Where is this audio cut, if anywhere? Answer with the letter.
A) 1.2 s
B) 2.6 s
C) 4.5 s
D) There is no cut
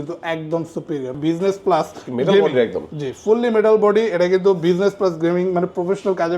A